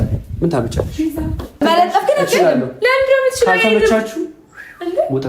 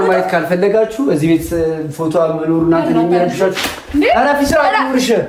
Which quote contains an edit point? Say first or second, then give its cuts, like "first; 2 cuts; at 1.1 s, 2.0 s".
first; 1 cut; at 1.6 s